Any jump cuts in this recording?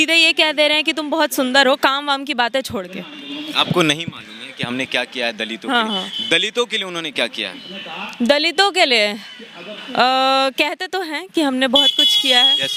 no; 0 cuts

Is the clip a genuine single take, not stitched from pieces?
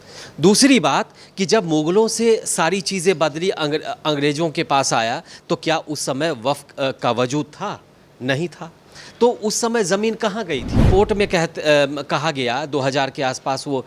no; 1 cut; at 10.9 s

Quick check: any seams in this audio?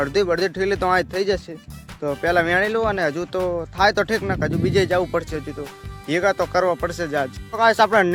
no; 0 cuts

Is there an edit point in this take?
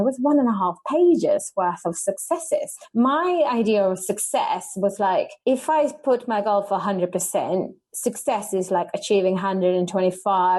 yes; 2 cuts; at 2.8 s, 5.3 s

